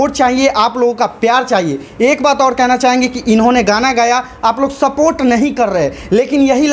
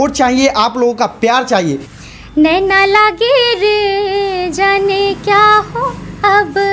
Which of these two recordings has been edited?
second; 1 cut; at 1.9 s

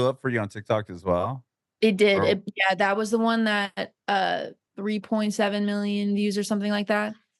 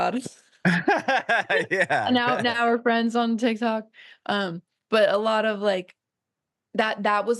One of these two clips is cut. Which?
first; 1 cut; at 4.6 s

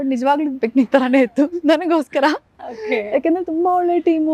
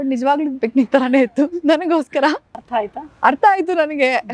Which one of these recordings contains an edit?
second; 1 cut; at 2.5 s

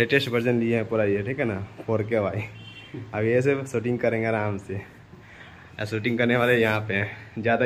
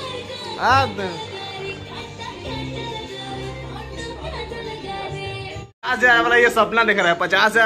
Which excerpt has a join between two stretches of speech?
second; 1 cut; at 5.7 s

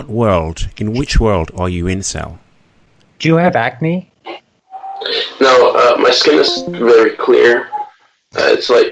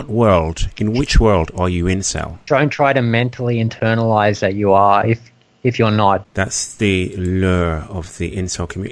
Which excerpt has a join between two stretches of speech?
second; 2 cuts; at 2.4 s, 6.3 s

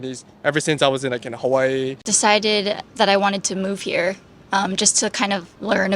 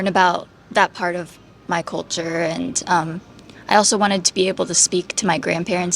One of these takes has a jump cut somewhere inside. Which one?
first; 1 cut; at 2.0 s

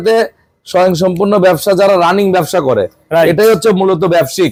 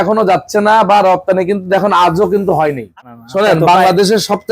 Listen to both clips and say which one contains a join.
second; 1 cut; at 3.0 s

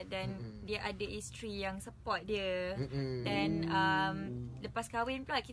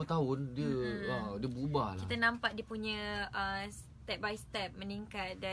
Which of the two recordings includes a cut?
first; 1 cut; at 1.9 s

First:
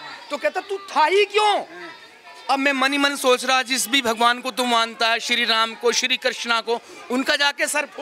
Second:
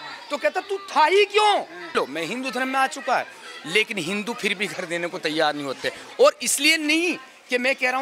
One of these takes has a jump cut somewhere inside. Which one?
second; 1 cut; at 1.9 s

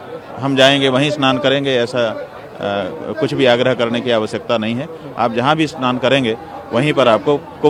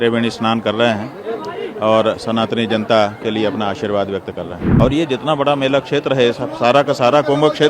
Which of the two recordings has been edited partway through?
second; 1 cut; at 4.6 s

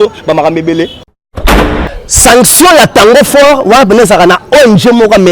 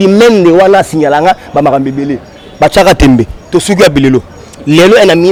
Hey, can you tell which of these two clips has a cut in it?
first; 1 cut; at 1.6 s

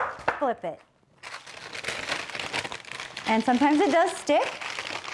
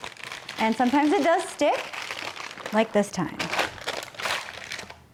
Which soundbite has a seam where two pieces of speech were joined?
first; 1 cut; at 1.6 s

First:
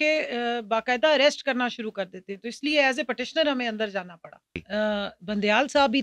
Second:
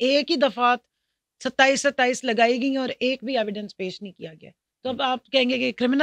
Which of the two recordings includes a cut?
first; 1 cut; at 4.6 s

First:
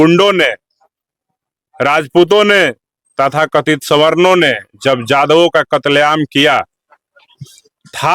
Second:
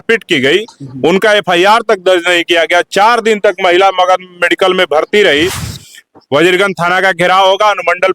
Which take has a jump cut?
second; 1 cut; at 5.7 s

